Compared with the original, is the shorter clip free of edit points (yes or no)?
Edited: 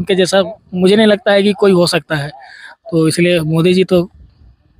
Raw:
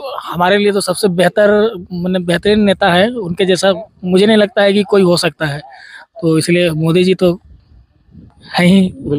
yes